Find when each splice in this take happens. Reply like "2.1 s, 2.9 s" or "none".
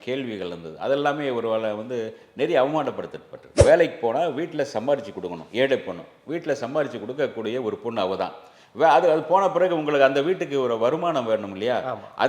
3.4 s